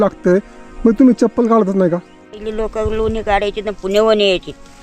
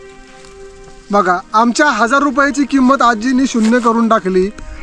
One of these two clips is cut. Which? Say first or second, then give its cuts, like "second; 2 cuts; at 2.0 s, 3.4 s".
first; 1 cut; at 2.3 s